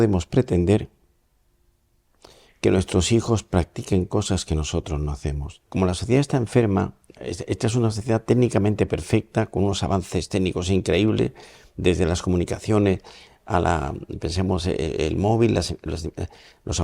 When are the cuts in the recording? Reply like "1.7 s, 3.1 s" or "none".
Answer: 5.7 s